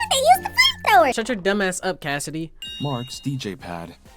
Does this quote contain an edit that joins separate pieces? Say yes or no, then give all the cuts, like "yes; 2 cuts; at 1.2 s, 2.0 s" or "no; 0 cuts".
yes; 1 cut; at 2.5 s